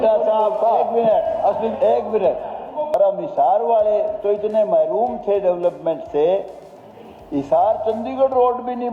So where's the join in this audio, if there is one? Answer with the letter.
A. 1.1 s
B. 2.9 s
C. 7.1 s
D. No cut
B